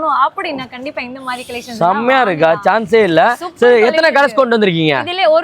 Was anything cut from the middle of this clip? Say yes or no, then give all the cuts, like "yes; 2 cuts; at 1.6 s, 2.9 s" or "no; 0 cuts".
no; 0 cuts